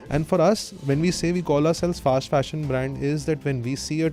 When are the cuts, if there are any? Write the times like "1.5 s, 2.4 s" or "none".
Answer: none